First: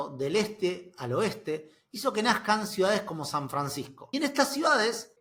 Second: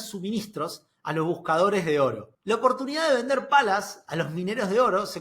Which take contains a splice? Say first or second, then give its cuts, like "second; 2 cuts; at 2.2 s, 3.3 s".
second; 1 cut; at 2.3 s